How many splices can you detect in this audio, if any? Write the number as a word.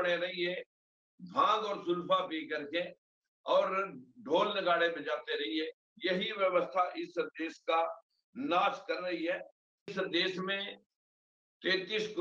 one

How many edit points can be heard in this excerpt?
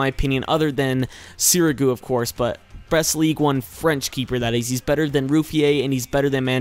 zero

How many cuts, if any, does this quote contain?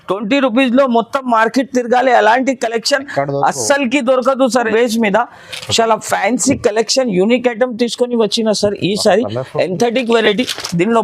one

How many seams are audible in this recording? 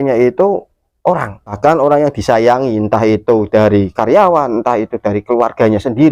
one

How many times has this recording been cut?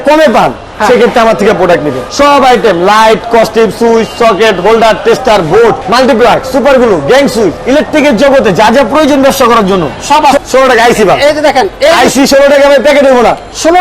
four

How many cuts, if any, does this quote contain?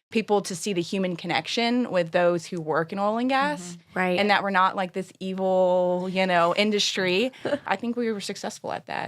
one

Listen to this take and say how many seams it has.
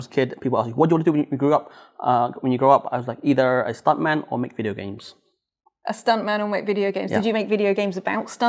zero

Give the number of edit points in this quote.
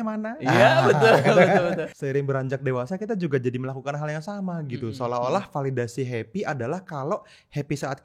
one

